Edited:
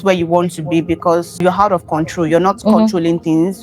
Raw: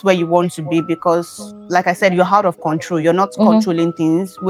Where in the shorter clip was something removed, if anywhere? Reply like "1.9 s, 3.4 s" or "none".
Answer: 1.4 s